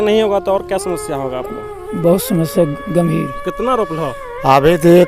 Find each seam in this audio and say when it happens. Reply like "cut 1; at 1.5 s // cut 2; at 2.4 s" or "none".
cut 1; at 3.4 s